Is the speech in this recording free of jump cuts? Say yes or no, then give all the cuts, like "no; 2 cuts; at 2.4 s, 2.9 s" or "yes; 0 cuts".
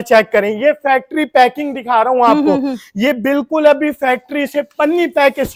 yes; 0 cuts